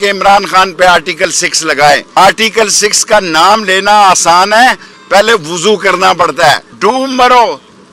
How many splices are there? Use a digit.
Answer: 2